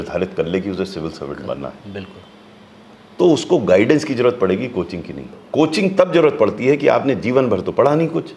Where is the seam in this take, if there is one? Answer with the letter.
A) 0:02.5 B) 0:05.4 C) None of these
B